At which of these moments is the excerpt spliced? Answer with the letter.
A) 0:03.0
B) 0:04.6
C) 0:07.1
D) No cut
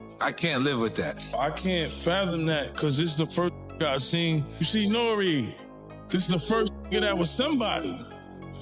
B